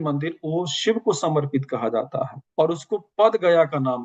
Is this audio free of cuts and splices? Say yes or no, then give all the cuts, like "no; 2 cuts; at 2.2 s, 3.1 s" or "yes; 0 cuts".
yes; 0 cuts